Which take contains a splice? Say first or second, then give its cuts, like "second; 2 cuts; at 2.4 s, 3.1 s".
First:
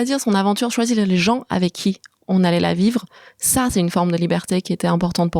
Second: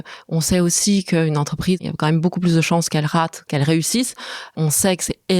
second; 3 cuts; at 1.9 s, 3.5 s, 4.5 s